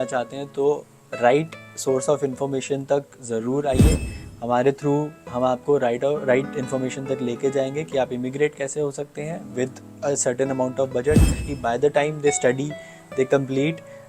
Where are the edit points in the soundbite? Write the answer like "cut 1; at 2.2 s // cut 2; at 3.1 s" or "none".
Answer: cut 1; at 11.5 s

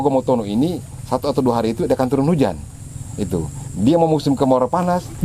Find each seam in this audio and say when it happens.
none

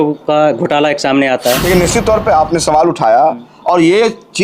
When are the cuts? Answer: cut 1; at 1.6 s

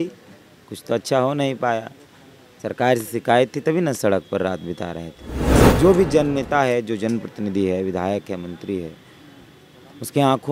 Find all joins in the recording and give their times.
cut 1; at 5.6 s

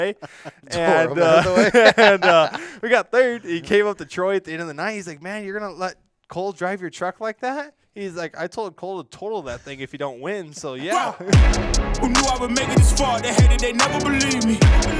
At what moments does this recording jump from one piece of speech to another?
cut 1; at 10.9 s

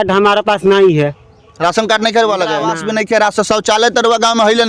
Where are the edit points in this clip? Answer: cut 1; at 2.7 s

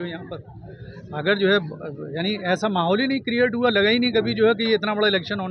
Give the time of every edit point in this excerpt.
none

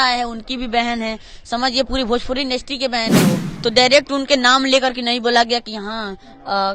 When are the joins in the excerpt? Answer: cut 1; at 3.5 s

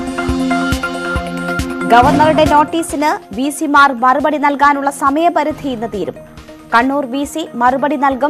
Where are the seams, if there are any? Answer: cut 1; at 1.2 s

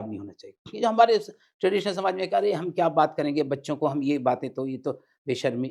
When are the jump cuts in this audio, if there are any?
none

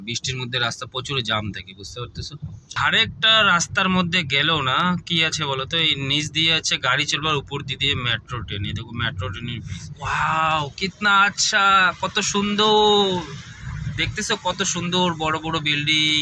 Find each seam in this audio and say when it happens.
cut 1; at 2.8 s // cut 2; at 9.9 s

